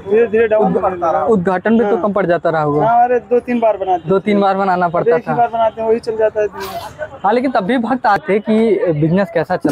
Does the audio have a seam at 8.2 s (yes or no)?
yes